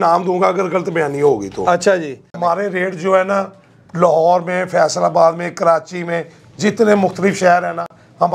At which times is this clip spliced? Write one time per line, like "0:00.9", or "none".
0:02.4